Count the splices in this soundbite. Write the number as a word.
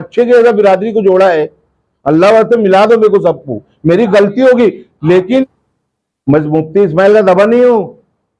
one